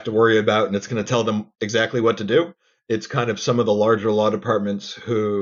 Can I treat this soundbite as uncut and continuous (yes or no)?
yes